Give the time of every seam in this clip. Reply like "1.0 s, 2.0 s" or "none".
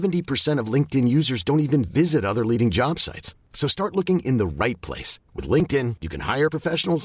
none

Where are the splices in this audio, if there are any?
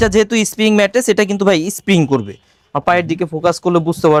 none

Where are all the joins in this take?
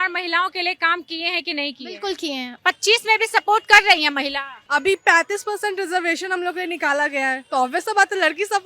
2.6 s, 4.6 s

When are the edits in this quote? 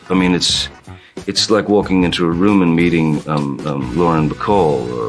none

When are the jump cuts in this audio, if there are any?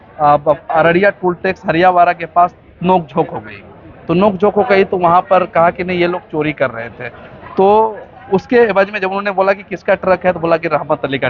none

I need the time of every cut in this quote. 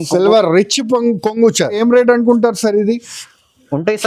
1.8 s

